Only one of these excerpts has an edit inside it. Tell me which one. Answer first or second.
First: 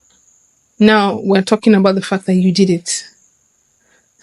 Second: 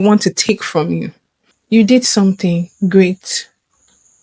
second